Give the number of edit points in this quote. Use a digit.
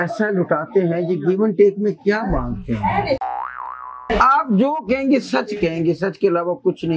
1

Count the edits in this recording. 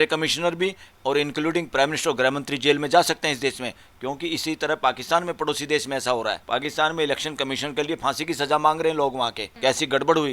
2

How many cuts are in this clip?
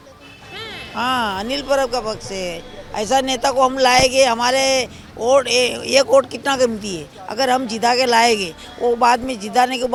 0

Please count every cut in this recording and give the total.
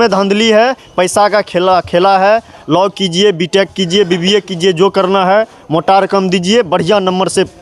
0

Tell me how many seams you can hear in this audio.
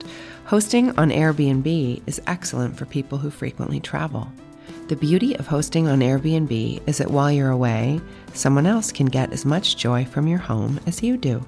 0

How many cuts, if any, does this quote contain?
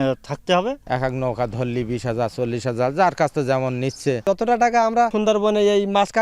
3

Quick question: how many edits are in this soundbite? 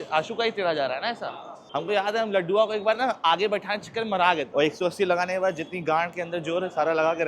2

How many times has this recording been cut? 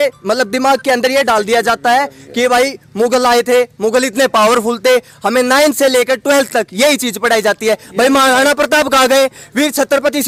0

